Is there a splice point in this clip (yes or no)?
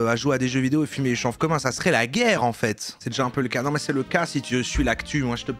yes